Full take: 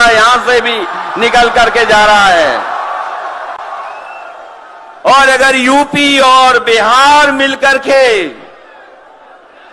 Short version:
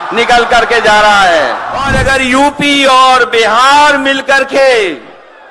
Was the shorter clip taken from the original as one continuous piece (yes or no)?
no